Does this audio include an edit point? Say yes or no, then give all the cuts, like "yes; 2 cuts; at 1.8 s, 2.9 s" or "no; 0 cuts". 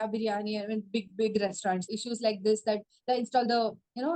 yes; 1 cut; at 1.9 s